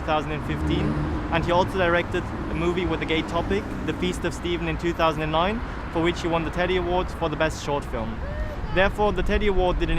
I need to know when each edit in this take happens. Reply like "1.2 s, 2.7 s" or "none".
7.3 s